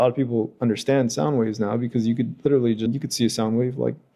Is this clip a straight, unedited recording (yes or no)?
no